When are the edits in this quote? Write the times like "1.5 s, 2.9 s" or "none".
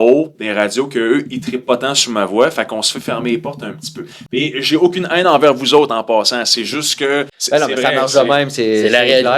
7.4 s